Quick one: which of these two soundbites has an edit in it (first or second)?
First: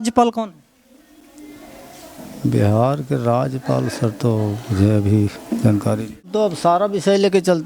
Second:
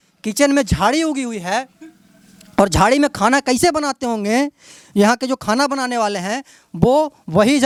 first